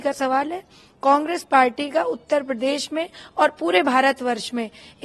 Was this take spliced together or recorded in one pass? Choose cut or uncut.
uncut